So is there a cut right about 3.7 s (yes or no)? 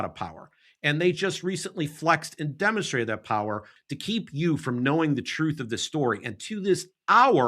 yes